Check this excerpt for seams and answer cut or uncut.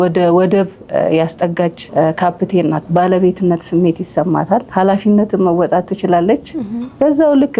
cut